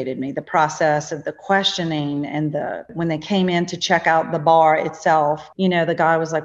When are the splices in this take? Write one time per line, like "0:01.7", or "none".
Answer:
0:02.9
0:05.5